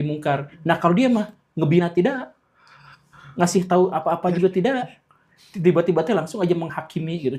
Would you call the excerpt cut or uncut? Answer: uncut